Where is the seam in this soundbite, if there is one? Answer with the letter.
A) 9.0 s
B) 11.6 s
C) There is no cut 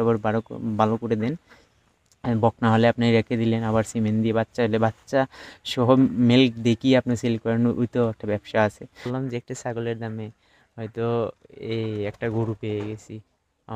A